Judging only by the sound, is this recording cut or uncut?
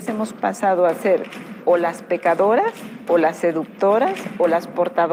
uncut